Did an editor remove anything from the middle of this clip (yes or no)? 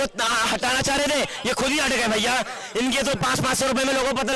no